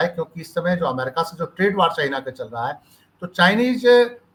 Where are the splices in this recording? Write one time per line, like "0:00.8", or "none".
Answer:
none